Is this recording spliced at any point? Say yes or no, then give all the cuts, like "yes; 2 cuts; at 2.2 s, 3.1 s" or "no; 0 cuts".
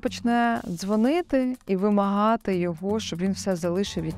no; 0 cuts